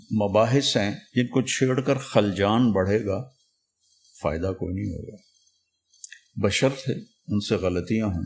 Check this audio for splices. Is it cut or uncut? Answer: cut